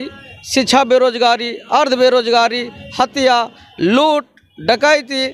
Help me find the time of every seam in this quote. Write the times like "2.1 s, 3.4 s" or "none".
none

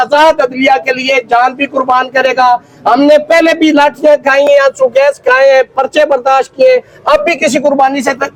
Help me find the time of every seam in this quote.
none

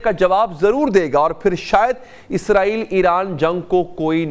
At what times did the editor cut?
none

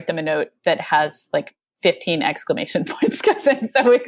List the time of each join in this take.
none

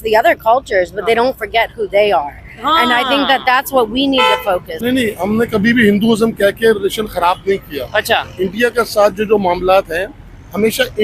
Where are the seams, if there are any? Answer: 4.7 s

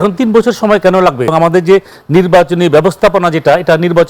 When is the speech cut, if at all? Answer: 1.3 s

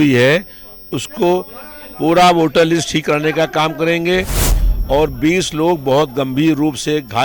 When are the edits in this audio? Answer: 4.6 s

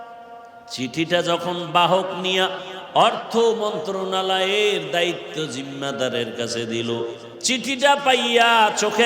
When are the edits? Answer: 7.3 s

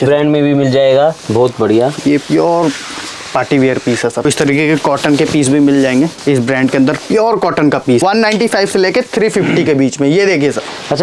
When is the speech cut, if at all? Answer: 4.2 s, 8.0 s

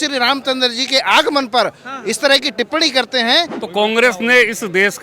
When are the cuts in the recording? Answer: 3.6 s

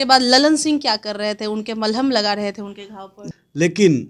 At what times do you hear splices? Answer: 3.2 s

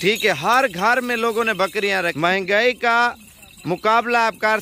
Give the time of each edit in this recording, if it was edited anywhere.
2.1 s

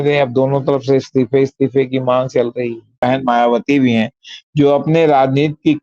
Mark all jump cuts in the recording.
3.0 s

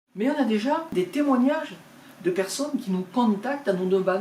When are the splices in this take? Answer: 0.9 s

